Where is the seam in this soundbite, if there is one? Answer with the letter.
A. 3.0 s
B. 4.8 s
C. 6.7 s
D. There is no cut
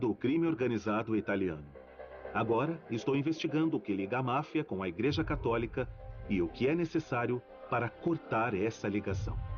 A